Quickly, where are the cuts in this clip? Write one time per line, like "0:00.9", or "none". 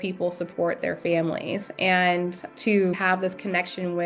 0:03.0